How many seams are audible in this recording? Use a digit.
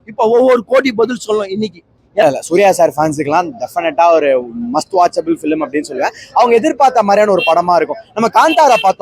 1